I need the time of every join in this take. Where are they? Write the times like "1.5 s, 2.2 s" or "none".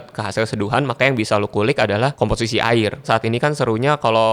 2.1 s, 3.1 s